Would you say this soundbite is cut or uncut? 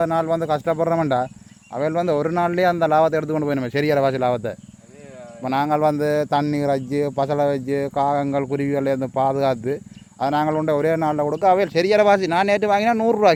uncut